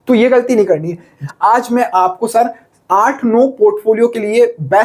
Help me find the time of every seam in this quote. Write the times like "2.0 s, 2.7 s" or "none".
1.2 s